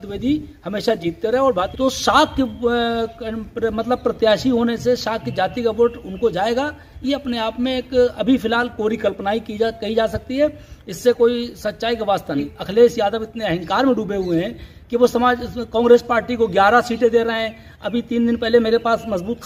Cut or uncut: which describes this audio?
cut